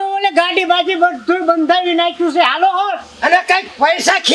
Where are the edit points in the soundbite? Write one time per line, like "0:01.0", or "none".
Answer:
none